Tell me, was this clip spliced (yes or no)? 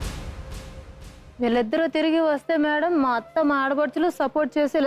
yes